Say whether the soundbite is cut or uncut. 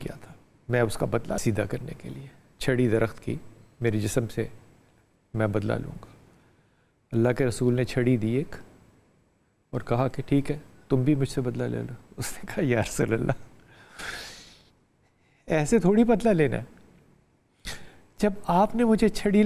cut